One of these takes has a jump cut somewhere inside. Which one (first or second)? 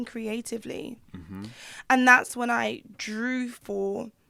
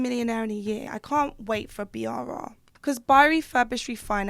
second